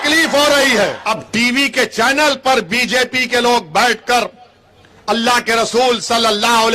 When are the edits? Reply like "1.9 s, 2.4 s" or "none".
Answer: 1.0 s